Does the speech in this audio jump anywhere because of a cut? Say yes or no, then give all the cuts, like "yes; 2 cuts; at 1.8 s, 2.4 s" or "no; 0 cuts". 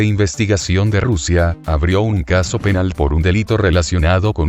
yes; 1 cut; at 1.7 s